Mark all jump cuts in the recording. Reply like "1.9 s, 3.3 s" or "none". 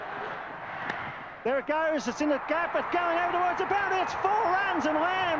none